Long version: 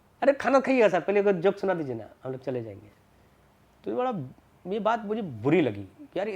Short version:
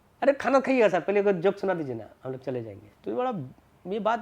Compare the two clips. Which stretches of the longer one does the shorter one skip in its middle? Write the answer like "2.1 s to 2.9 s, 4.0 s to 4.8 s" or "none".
2.8 s to 3.6 s